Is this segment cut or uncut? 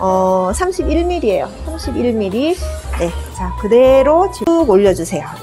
cut